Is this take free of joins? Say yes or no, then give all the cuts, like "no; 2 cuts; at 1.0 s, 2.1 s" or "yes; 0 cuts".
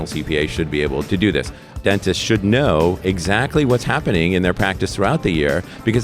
no; 1 cut; at 1.8 s